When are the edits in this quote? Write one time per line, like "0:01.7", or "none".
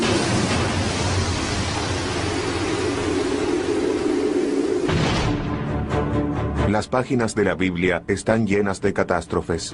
none